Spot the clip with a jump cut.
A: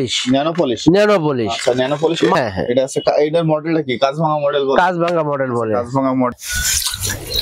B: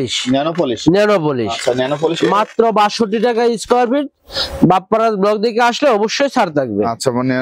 A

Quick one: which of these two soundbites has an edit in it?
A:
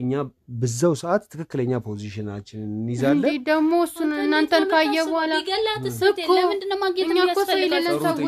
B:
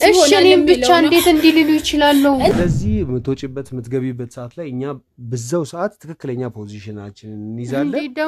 B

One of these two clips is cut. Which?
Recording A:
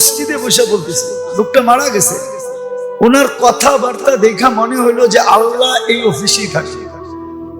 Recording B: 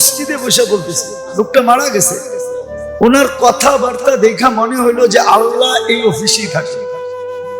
A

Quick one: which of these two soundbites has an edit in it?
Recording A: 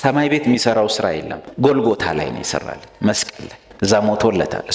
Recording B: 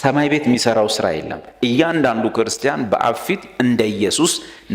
B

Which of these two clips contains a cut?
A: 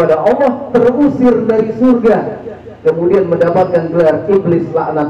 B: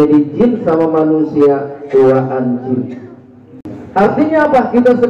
B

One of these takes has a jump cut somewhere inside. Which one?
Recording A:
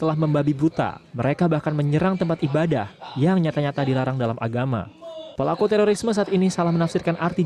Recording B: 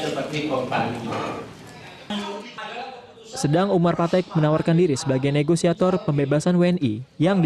B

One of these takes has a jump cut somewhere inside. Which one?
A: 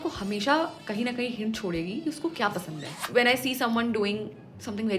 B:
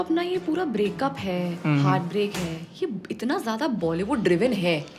A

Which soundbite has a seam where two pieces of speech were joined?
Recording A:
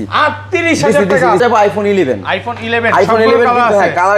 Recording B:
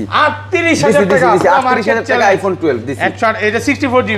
A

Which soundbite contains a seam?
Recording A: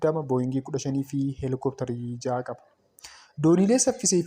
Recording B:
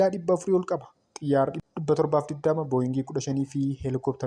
B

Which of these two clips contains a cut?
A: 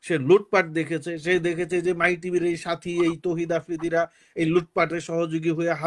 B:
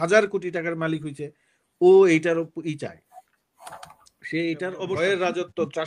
B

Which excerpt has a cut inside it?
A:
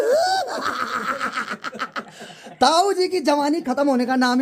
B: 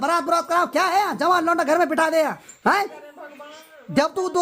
B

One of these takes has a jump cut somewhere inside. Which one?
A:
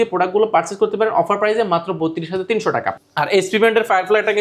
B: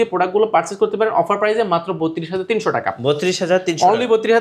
A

